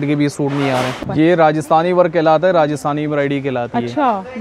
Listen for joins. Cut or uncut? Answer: cut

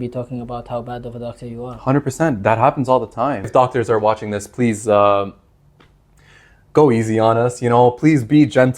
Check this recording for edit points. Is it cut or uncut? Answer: cut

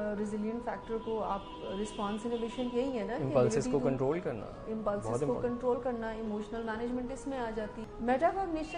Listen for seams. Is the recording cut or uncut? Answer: cut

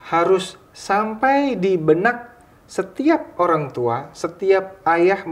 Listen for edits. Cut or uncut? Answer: uncut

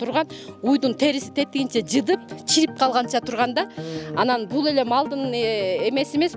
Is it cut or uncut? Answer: uncut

